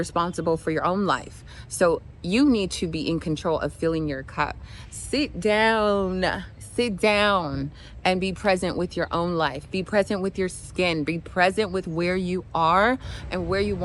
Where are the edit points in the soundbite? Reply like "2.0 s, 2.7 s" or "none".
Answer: none